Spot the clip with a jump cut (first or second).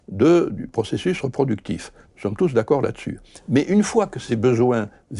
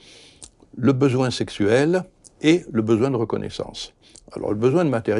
first